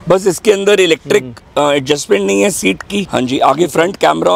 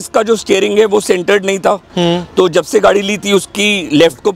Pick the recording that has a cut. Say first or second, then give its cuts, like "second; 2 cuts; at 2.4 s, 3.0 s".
first; 1 cut; at 3.0 s